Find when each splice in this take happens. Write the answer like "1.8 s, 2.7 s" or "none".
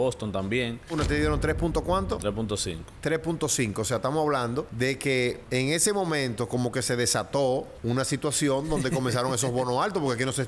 0.9 s, 4.7 s, 5.4 s, 7.7 s